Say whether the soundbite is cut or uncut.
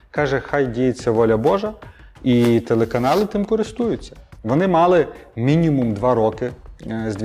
uncut